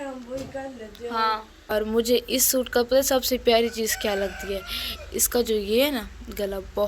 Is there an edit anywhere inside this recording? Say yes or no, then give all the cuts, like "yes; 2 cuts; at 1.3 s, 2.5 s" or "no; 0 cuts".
yes; 1 cut; at 1.7 s